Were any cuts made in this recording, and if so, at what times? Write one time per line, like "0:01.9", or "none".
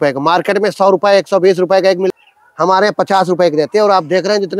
0:02.1

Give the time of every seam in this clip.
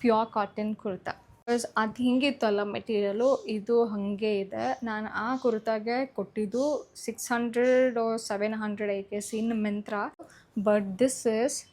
0:01.5
0:10.4

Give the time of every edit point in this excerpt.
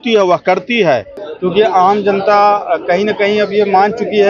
0:01.2

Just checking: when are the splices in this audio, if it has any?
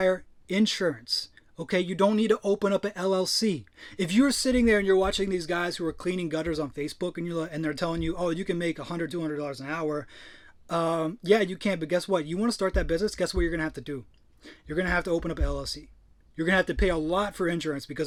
none

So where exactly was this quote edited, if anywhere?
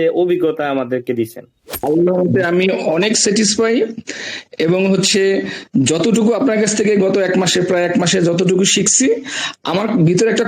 0:01.8

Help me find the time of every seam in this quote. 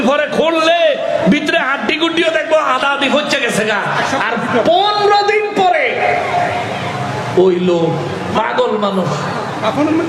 none

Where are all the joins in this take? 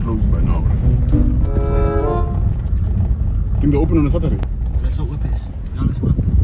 0:04.4

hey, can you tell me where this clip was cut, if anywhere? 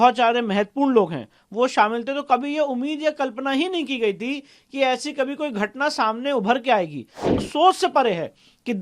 0:07.4

